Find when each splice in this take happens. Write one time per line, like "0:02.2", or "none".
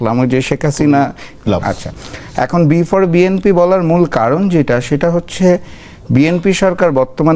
0:01.4